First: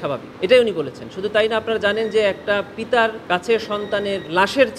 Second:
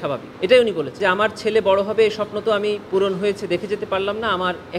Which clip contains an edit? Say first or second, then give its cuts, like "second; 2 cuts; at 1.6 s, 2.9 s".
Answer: second; 1 cut; at 0.9 s